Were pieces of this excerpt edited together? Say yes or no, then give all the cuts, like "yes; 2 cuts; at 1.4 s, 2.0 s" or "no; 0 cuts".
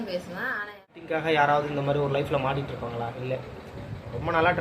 yes; 1 cut; at 1.0 s